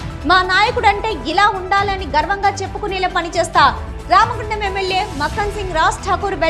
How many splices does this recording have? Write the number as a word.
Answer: zero